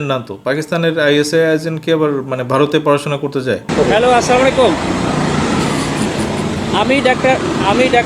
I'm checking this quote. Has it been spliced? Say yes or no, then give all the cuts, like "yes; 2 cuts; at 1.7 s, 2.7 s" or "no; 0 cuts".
yes; 1 cut; at 3.7 s